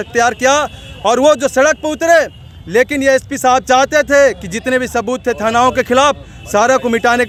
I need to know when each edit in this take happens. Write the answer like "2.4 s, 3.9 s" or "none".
none